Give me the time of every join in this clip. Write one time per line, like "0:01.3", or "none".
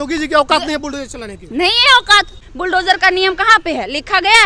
0:02.4